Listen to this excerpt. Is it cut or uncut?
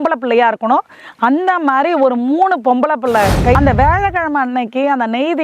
cut